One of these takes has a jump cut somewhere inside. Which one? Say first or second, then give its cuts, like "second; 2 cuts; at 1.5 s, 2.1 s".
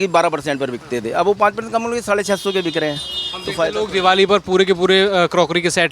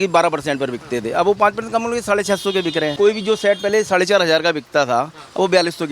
second; 1 cut; at 2.9 s